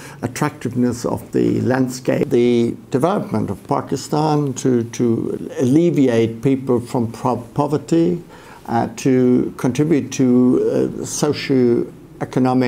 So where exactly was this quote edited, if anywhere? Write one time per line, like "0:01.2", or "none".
0:02.2